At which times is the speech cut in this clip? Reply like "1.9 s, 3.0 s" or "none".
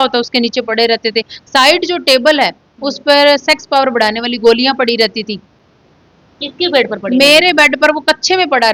none